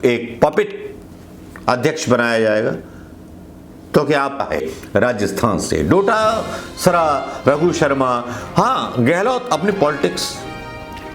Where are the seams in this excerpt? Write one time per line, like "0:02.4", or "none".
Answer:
0:04.4

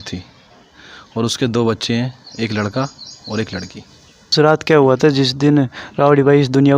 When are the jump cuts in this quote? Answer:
0:04.3

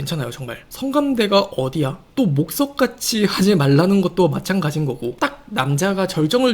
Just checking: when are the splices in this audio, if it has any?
0:02.0
0:05.1

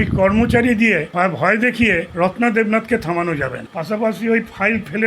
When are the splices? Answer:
0:01.1
0:02.1
0:03.7

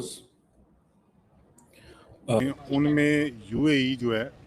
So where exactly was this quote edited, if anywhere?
0:02.4

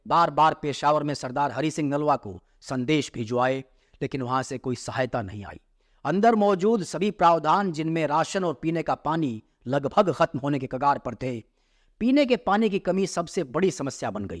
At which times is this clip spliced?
none

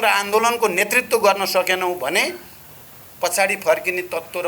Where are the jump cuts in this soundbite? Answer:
none

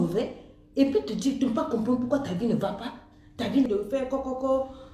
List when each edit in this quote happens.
0:03.7

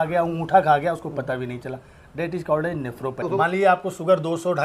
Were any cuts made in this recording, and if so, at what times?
0:03.2

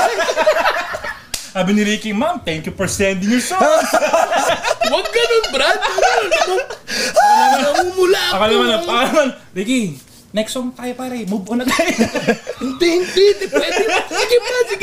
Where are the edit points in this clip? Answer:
none

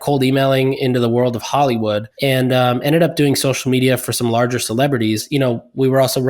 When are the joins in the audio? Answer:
0:02.1
0:05.2

